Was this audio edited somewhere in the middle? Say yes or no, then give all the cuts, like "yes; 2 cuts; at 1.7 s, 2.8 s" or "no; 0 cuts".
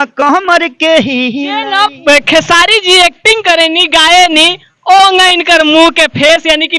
yes; 1 cut; at 1.7 s